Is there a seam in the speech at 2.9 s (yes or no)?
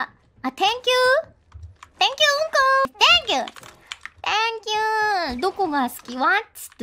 yes